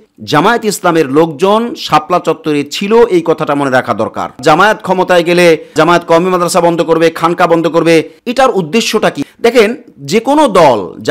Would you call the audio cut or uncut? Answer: cut